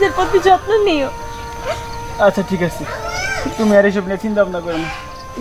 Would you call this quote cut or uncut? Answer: uncut